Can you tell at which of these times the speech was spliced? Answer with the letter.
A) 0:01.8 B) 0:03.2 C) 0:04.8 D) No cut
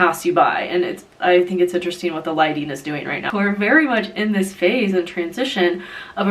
B